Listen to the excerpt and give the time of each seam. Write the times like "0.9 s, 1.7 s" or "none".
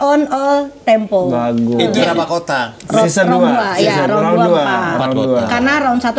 2.2 s